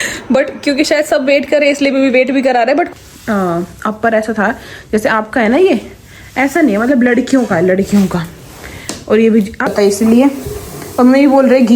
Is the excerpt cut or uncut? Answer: cut